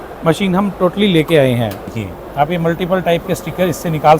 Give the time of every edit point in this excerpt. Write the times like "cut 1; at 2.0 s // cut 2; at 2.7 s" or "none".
cut 1; at 1.8 s